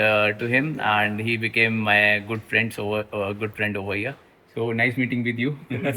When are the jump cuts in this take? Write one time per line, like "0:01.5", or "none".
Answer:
none

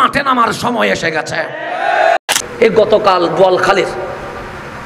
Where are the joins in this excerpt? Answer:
0:02.2

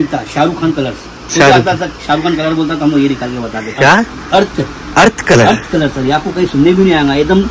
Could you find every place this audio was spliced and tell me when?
0:03.6
0:05.1

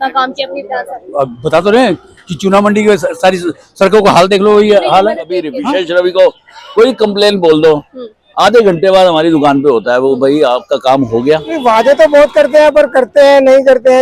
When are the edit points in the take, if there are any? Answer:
0:05.6
0:11.5

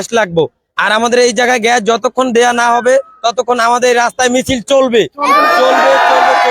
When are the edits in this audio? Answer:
none

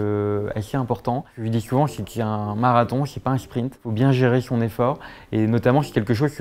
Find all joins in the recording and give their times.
0:01.4
0:03.8

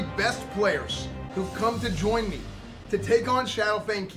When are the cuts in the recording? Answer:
none

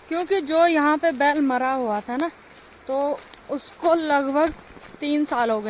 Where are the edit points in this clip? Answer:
none

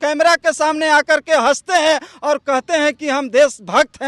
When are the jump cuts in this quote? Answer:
none

